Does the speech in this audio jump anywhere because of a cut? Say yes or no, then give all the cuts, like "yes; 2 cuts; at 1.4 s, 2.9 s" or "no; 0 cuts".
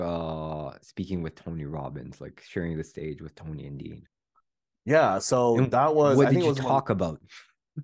no; 0 cuts